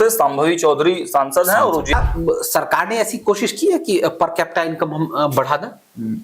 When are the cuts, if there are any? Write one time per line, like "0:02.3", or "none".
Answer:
0:01.9

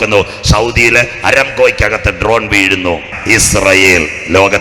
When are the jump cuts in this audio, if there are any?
0:03.1

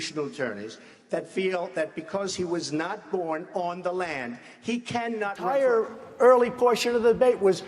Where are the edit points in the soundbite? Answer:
0:05.5

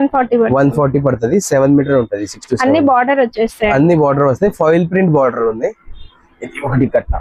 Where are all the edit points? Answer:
none

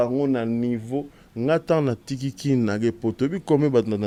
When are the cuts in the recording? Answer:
none

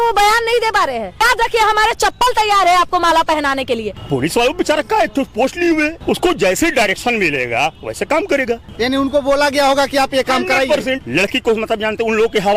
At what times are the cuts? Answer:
0:01.2
0:03.9
0:06.0
0:08.7
0:11.0

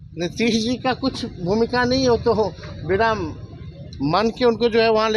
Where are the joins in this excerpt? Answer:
none

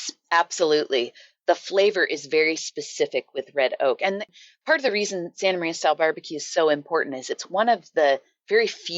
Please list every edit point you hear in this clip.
0:01.2

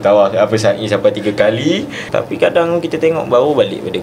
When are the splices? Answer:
0:02.0

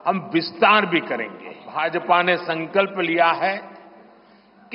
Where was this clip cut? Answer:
0:01.7

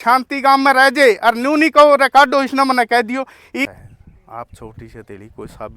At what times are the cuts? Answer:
0:03.7

